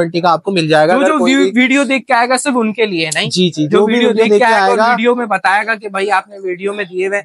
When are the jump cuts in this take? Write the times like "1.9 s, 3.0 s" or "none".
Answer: none